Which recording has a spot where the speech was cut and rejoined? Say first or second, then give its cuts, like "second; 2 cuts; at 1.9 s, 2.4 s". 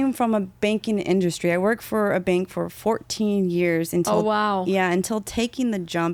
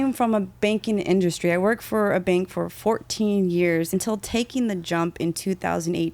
second; 1 cut; at 3.9 s